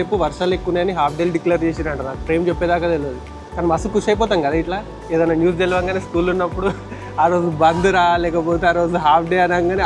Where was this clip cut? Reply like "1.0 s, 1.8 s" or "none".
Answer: none